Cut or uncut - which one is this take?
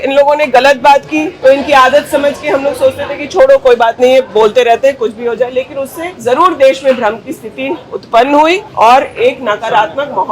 cut